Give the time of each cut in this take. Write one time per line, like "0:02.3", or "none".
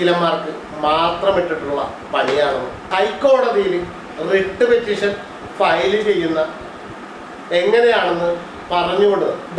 0:02.8